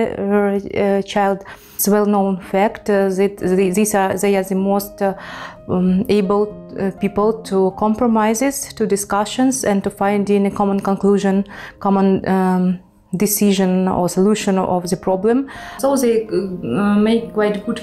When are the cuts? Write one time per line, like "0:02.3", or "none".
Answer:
0:01.7
0:15.6